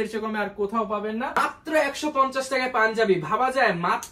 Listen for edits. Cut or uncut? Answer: cut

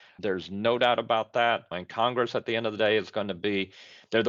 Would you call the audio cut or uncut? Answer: cut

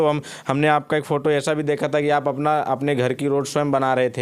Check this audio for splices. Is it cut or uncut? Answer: uncut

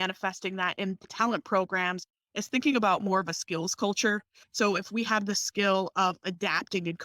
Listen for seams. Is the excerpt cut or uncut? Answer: cut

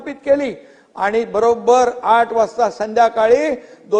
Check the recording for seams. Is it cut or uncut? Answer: uncut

